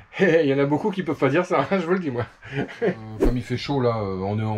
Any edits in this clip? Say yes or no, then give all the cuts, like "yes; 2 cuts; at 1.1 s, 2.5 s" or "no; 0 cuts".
yes; 1 cut; at 3.1 s